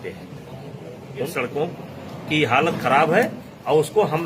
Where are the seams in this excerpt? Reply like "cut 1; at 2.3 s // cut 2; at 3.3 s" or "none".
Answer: cut 1; at 1.2 s